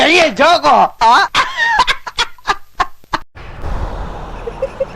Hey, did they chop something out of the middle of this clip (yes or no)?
yes